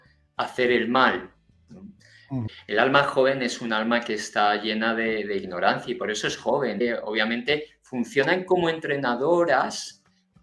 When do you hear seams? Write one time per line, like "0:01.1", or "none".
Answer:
0:02.5
0:06.8

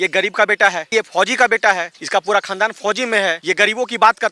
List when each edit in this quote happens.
0:00.9
0:01.9
0:03.4

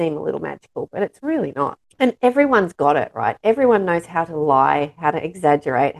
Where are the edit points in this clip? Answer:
0:01.8

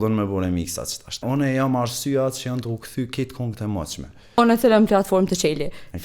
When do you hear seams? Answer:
0:01.2
0:04.4

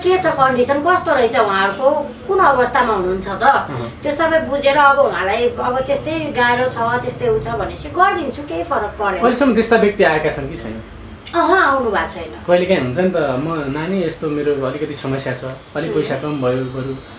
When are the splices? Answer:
none

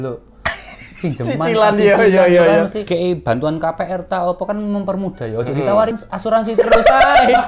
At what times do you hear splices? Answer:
0:02.8
0:06.0

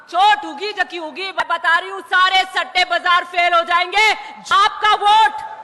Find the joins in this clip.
0:01.4
0:04.3

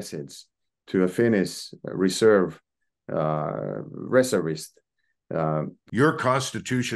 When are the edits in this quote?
0:05.8

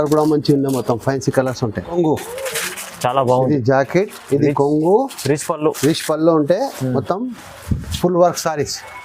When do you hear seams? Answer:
0:01.9

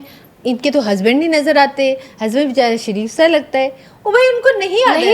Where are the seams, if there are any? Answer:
none

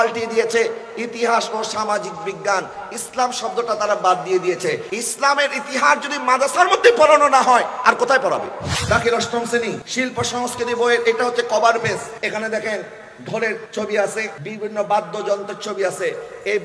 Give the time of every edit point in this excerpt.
0:04.9
0:08.7
0:09.8
0:12.1
0:13.7
0:14.4

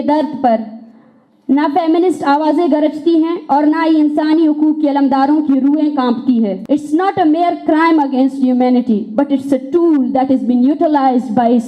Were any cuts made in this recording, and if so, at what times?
0:06.6

